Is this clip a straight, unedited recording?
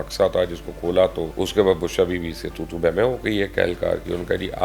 no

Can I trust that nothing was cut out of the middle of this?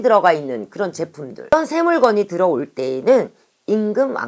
no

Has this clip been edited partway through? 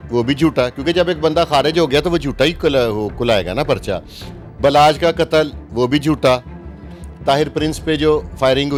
no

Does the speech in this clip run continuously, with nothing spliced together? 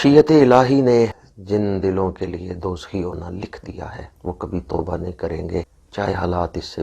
no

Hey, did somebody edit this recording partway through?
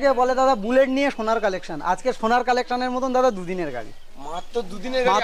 no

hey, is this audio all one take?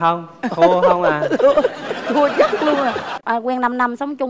no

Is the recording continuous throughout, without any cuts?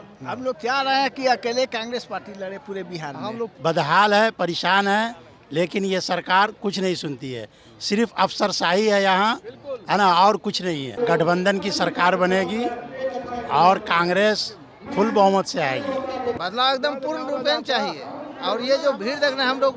no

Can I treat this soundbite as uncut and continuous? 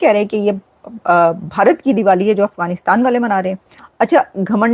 no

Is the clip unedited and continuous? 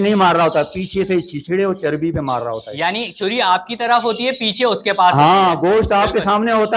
yes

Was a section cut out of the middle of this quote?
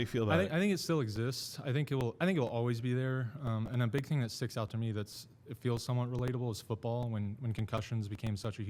no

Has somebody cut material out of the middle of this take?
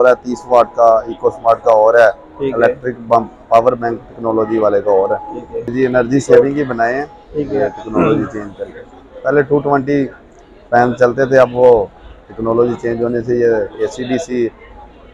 yes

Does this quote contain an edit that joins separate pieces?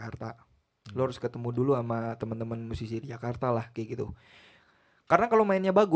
no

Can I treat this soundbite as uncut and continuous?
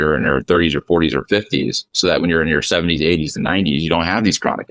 yes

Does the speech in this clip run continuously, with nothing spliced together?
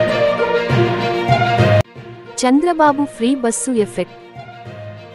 no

